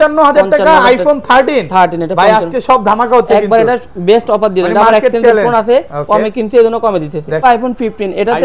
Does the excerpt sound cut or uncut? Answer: cut